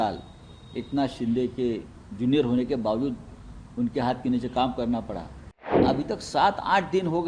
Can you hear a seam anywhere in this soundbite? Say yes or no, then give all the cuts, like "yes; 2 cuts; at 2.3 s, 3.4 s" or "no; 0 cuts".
yes; 1 cut; at 5.8 s